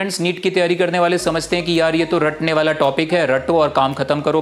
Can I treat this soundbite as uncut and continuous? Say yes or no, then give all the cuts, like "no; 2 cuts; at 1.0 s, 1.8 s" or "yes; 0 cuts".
yes; 0 cuts